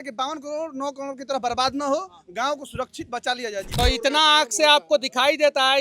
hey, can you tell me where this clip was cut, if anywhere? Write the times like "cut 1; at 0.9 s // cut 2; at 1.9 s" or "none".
cut 1; at 3.7 s